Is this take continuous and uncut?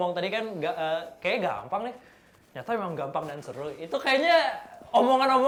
yes; 0 cuts

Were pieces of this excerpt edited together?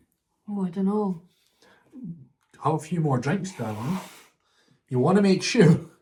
no; 0 cuts

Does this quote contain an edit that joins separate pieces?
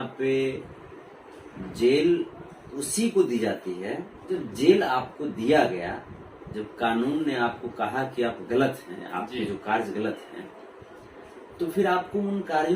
yes; 1 cut; at 4.3 s

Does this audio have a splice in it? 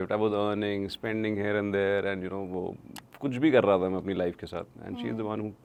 no; 0 cuts

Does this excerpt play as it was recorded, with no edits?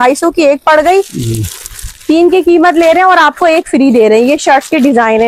yes; 0 cuts

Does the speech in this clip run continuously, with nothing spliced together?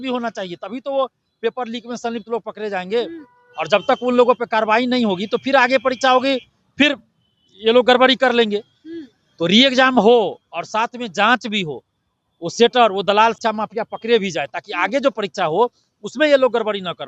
yes; 0 cuts

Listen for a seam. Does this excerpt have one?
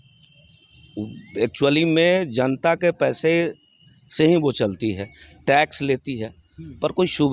no; 0 cuts

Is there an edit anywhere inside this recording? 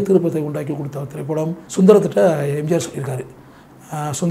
yes; 1 cut; at 1.6 s

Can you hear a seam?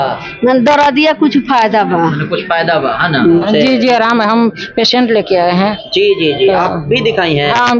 yes; 1 cut; at 3.4 s

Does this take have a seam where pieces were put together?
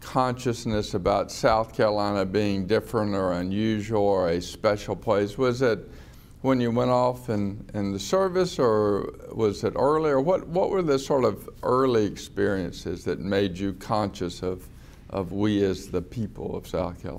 no; 0 cuts

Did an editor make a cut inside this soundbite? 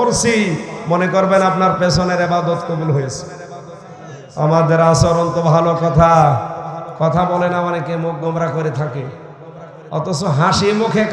no; 0 cuts

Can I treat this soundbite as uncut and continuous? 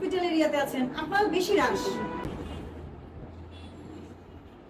no; 1 cut; at 2.2 s

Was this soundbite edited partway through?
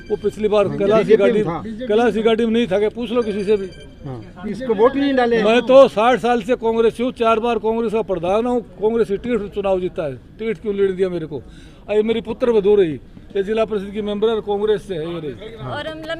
no; 0 cuts

